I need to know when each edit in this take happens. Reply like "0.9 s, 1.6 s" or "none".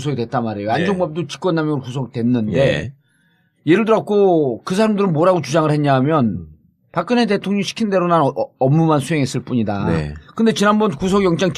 2.2 s